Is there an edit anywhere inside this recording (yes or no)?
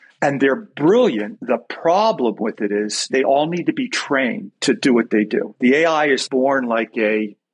yes